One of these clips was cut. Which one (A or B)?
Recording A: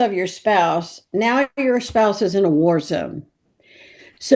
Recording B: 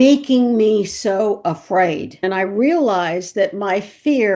B